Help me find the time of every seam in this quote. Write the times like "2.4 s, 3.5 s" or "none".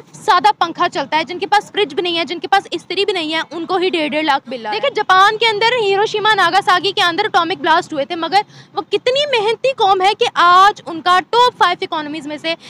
4.5 s